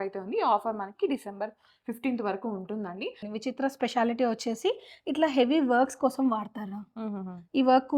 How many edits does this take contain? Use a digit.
1